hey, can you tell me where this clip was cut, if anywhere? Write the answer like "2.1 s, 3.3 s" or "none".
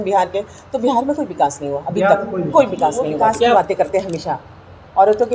3.5 s